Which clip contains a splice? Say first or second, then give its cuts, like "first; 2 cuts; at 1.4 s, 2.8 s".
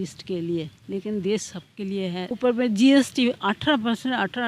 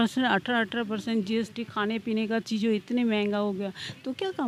first; 1 cut; at 2.3 s